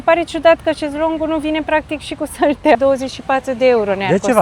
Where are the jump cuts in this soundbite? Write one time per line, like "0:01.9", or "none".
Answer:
0:02.7